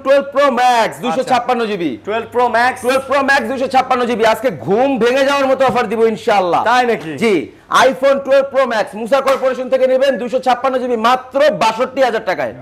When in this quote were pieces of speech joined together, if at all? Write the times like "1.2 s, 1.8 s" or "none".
none